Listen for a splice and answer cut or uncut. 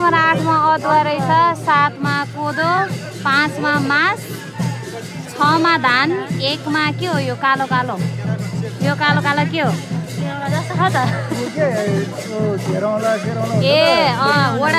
uncut